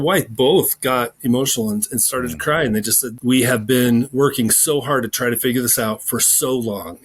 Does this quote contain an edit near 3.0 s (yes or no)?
yes